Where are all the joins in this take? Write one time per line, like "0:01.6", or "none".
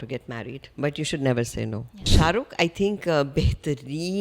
0:02.1